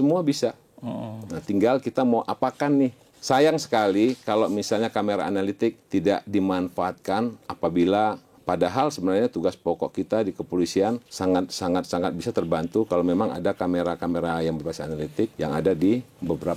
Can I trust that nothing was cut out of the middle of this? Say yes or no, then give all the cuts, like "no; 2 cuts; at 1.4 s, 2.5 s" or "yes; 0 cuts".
no; 5 cuts; at 3.1 s, 5.8 s, 8.3 s, 11.1 s, 15.3 s